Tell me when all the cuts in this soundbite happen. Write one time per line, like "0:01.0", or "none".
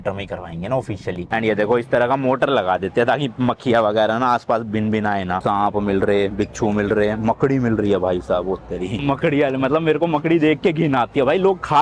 0:01.2
0:05.4
0:09.0